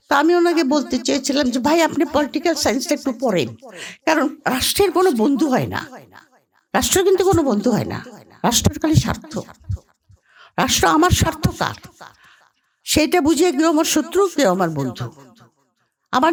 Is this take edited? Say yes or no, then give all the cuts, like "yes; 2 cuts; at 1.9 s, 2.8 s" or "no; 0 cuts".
no; 0 cuts